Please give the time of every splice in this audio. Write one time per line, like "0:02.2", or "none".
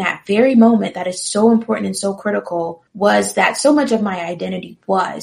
0:02.8

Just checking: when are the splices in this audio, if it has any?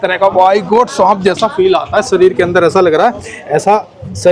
none

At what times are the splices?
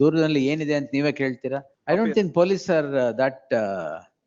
0:01.7

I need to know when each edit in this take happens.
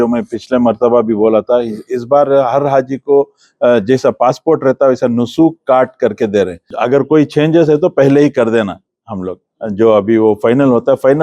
0:06.6

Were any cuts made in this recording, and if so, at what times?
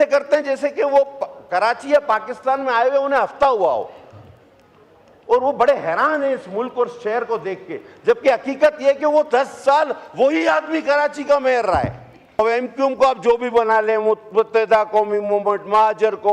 0:12.4

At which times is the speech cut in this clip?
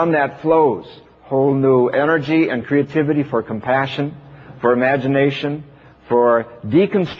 none

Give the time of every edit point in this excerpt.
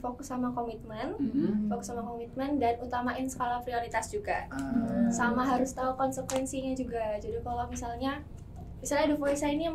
none

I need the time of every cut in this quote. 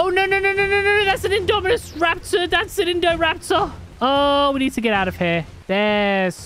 0:03.8
0:05.5

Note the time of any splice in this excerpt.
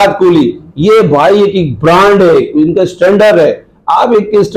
none

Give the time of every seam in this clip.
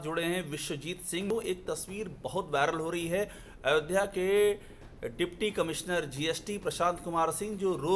0:01.3

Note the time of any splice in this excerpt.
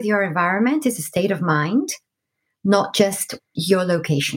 0:03.4

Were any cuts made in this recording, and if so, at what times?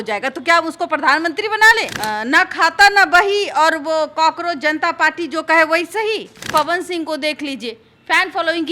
0:01.9
0:06.4

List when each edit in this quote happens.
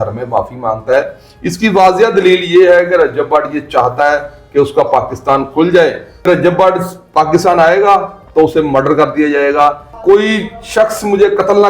0:06.2
0:09.9

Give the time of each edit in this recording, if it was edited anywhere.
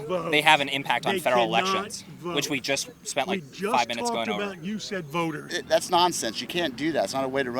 0:05.6

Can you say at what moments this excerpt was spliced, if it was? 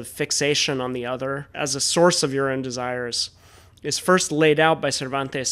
0:01.5

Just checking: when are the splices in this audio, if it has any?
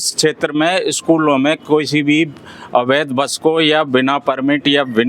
none

